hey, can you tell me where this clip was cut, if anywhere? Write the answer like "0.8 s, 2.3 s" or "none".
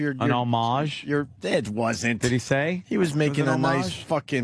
0.9 s